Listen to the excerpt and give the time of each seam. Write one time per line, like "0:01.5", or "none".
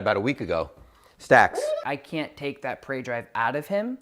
0:01.8

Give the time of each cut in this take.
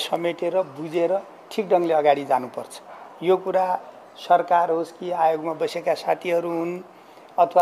none

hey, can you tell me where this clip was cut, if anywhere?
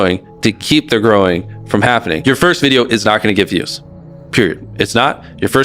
0:02.2

